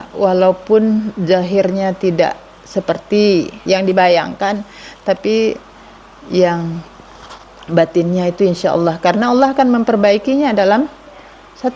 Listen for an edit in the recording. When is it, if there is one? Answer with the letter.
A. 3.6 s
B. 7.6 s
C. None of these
A